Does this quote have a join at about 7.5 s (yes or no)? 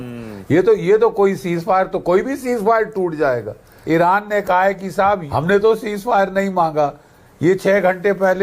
no